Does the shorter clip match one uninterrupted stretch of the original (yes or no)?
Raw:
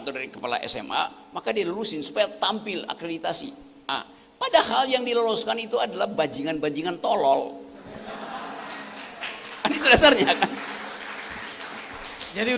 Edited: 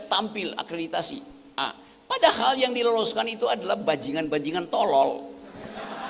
yes